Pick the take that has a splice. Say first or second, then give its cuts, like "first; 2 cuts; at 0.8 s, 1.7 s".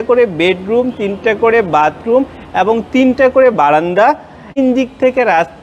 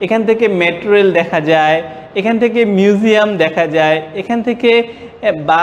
first; 1 cut; at 4.6 s